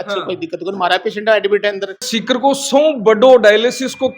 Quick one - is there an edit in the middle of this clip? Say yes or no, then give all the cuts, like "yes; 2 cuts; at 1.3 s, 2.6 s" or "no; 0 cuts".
yes; 1 cut; at 2.1 s